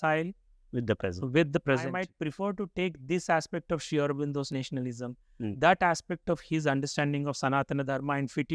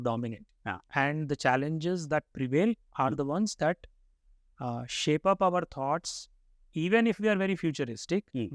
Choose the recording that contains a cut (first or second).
first